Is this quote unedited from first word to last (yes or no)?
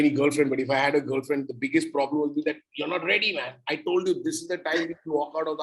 yes